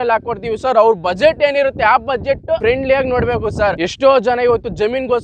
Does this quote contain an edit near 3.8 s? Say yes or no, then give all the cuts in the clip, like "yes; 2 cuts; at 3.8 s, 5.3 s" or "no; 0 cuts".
yes; 2 cuts; at 2.6 s, 3.8 s